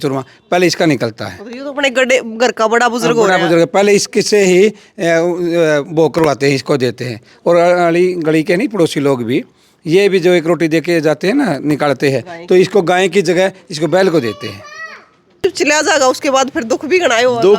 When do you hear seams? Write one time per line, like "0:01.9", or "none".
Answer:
0:15.4